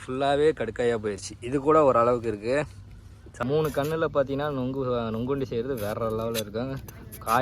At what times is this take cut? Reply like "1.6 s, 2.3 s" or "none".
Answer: 3.4 s